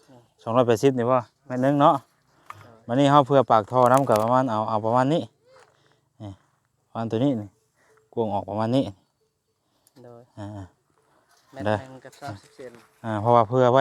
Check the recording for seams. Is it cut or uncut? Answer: uncut